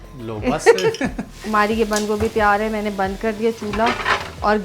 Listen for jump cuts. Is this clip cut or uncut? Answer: cut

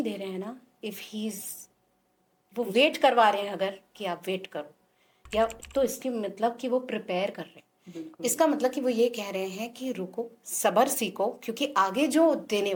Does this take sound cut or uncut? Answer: uncut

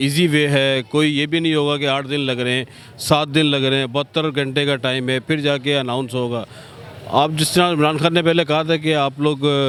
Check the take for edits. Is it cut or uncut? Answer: uncut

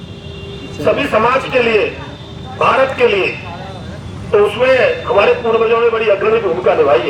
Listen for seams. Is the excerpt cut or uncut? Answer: uncut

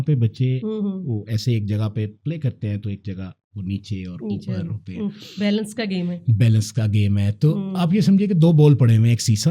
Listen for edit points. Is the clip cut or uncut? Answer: uncut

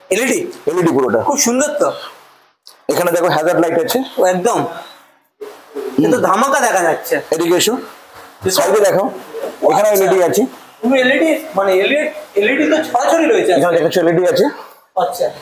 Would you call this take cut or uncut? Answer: uncut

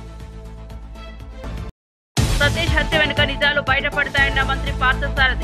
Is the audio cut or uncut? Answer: cut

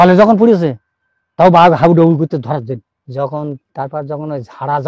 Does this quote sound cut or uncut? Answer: cut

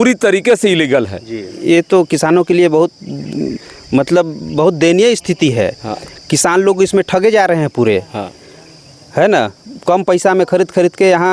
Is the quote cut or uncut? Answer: cut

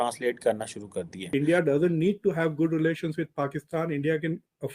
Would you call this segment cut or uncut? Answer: cut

